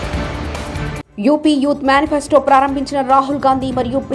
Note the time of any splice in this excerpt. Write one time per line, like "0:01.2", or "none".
0:00.9